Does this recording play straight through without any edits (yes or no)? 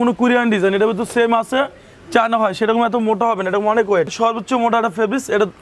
no